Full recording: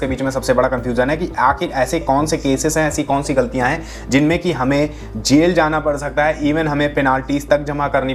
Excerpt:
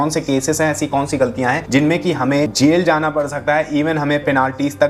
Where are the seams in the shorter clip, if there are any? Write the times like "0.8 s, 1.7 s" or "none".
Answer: 1.6 s, 2.5 s